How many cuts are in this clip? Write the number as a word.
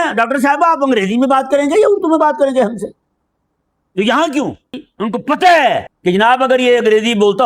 two